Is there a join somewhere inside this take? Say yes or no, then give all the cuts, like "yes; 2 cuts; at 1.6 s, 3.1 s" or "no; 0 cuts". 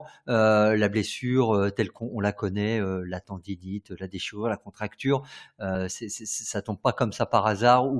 yes; 1 cut; at 5.7 s